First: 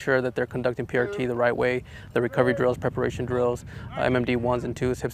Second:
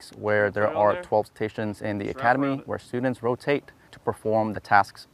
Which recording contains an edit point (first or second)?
second